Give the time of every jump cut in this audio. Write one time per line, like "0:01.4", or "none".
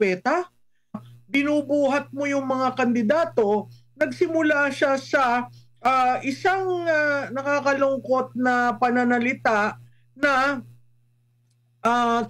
0:01.0